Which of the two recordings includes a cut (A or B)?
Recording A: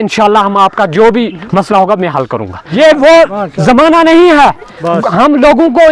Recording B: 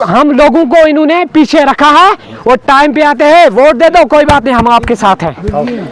A